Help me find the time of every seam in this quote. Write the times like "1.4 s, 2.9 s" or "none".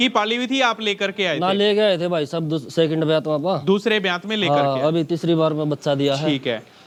none